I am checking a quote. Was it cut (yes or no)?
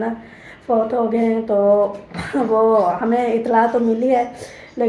no